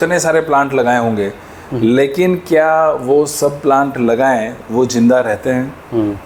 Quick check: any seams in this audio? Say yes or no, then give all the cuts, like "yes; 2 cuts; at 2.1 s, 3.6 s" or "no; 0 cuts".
no; 0 cuts